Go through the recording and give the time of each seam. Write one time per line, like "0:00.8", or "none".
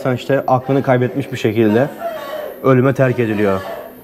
none